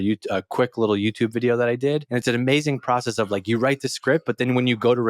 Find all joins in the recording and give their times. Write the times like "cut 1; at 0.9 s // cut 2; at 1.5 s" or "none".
cut 1; at 2.1 s